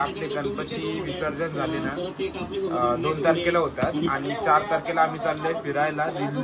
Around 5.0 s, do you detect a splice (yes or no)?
no